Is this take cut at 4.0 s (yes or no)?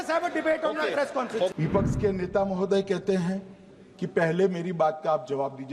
no